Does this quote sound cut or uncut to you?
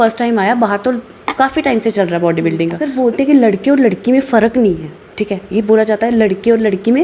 cut